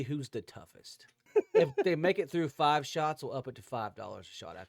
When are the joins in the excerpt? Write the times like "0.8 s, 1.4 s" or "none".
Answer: 1.3 s